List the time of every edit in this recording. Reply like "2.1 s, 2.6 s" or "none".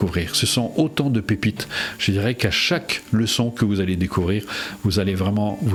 none